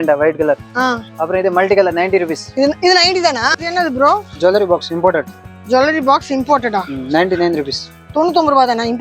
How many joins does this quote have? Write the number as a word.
one